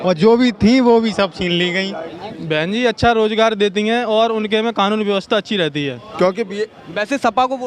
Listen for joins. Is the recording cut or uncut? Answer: cut